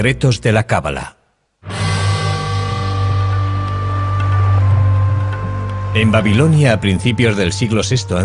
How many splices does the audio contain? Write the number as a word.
one